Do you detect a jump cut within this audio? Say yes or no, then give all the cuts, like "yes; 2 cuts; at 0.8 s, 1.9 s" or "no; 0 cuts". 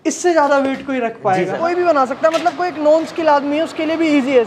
yes; 1 cut; at 1.5 s